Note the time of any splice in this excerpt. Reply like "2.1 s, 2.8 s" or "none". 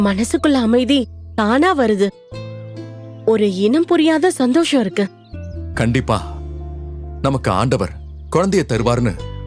none